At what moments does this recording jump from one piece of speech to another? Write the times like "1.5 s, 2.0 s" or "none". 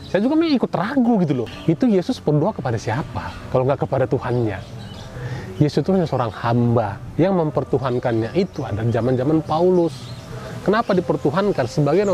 1.5 s